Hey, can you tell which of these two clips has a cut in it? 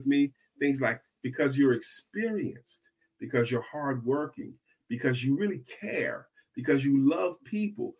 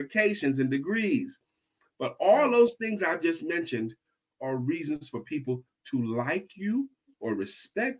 second; 2 cuts; at 1.8 s, 4.3 s

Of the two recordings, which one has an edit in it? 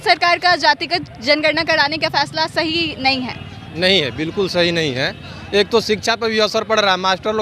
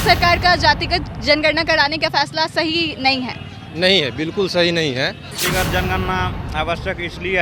second; 1 cut; at 5.3 s

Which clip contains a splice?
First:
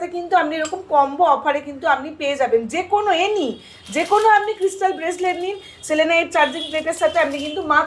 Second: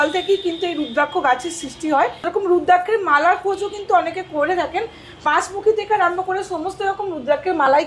second; 1 cut; at 2.2 s

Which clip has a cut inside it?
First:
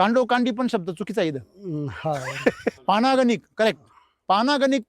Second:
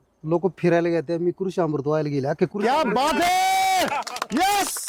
first; 1 cut; at 2.8 s

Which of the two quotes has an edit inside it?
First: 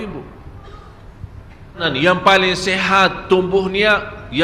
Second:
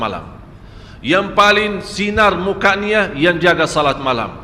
first; 1 cut; at 1.8 s

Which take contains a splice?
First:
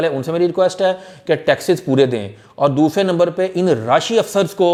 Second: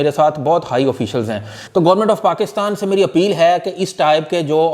second; 1 cut; at 1.6 s

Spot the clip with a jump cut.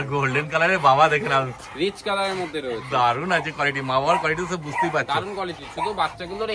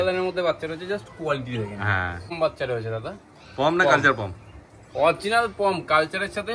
second; 1 cut; at 2.3 s

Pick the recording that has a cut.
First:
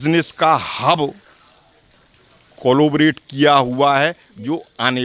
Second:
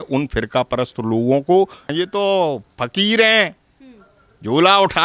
second; 1 cut; at 1.8 s

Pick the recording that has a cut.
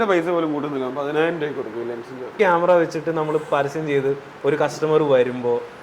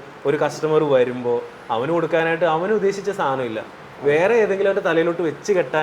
first; 1 cut; at 2.4 s

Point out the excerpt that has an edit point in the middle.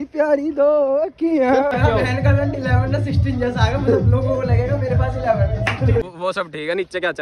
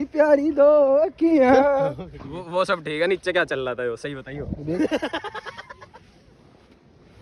first; 2 cuts; at 1.7 s, 6.0 s

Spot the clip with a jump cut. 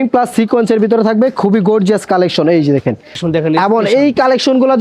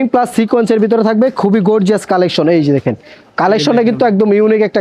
first; 1 cut; at 3.2 s

